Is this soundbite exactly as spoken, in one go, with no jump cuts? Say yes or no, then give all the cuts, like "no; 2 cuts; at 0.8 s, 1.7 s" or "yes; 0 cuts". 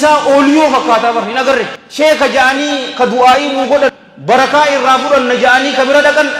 no; 2 cuts; at 1.8 s, 4.1 s